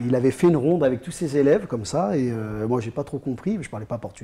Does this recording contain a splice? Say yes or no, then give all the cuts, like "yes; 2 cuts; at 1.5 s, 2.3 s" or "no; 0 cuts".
no; 0 cuts